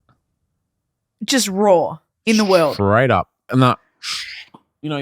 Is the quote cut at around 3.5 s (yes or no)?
yes